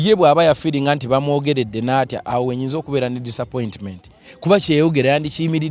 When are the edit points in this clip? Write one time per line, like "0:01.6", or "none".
none